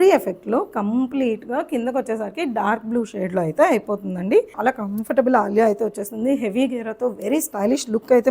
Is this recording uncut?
no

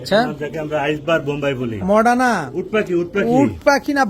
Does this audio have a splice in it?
yes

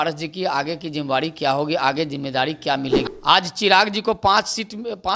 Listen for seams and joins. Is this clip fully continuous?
no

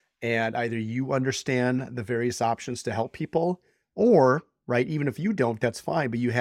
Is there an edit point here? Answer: no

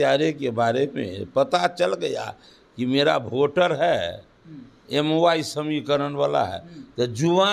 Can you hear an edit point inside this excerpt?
no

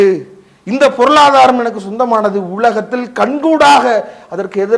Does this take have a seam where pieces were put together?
no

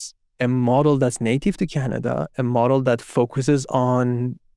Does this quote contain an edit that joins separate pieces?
no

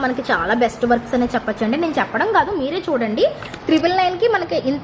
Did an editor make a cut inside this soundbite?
no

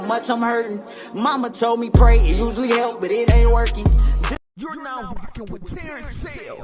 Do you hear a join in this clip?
yes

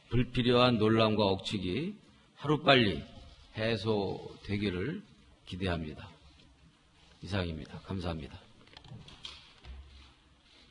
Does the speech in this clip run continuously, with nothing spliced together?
yes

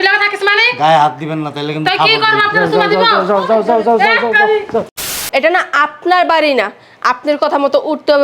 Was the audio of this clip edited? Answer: yes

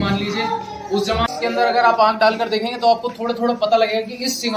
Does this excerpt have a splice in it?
yes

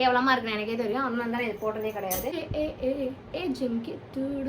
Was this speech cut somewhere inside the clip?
yes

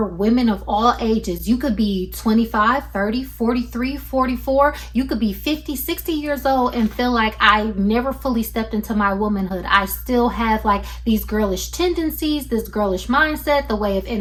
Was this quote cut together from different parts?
no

